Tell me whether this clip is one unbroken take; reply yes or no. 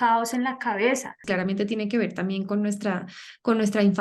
no